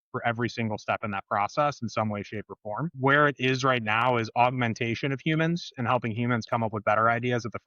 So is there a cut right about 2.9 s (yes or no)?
yes